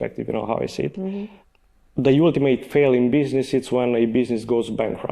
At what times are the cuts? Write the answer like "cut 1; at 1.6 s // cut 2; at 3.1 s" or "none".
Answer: cut 1; at 1.4 s